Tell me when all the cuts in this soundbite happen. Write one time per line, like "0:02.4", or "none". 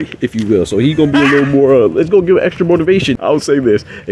0:03.2